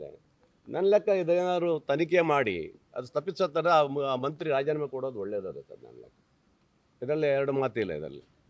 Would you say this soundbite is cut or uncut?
uncut